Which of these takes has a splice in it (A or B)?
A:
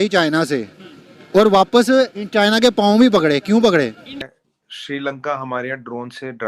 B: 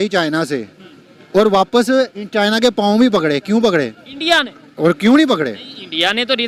A